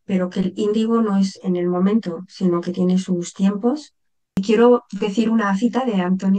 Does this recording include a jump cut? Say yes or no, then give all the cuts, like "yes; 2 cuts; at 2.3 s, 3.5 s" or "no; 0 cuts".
yes; 1 cut; at 4.4 s